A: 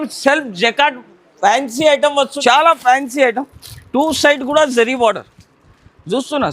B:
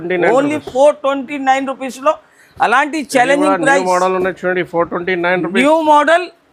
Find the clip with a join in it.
A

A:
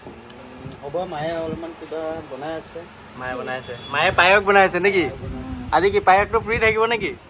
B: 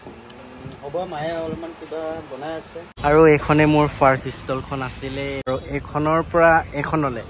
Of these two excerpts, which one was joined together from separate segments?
B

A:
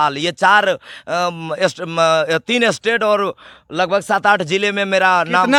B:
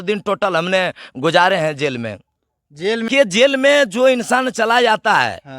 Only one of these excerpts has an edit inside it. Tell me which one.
B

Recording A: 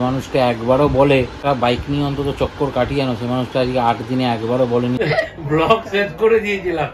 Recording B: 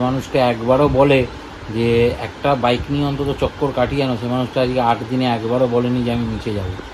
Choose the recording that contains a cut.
A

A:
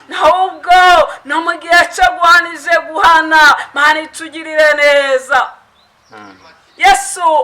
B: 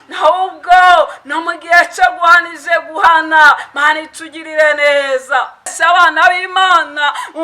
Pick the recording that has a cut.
B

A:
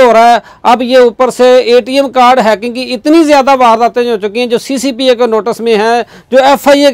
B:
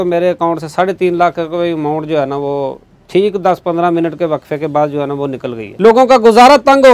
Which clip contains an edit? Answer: B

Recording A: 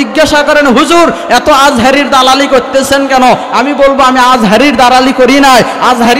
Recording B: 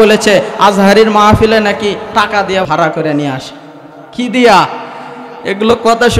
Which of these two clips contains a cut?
B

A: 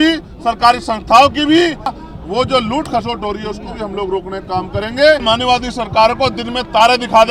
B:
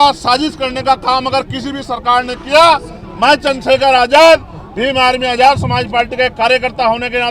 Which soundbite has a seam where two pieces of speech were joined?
A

